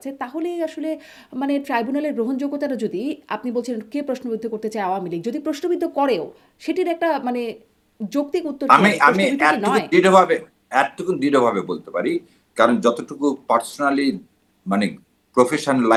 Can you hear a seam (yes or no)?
no